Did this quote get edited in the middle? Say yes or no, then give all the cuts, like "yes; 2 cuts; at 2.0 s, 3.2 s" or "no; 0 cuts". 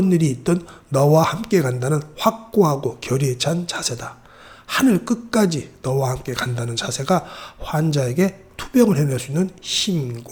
no; 0 cuts